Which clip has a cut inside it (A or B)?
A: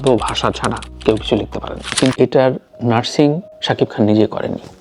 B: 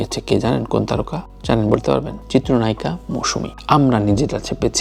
A